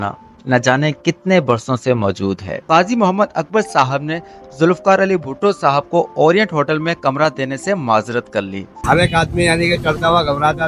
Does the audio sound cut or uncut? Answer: cut